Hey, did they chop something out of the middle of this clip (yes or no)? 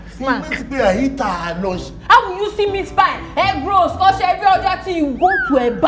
yes